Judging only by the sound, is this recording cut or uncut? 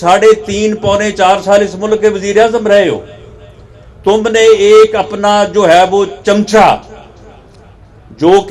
uncut